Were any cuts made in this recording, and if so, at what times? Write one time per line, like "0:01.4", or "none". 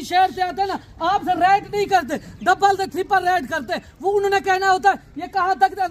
none